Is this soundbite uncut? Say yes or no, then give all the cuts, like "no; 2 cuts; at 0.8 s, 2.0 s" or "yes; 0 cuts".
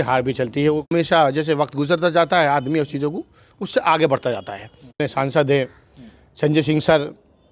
no; 2 cuts; at 0.8 s, 5.0 s